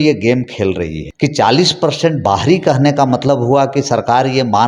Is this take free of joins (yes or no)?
no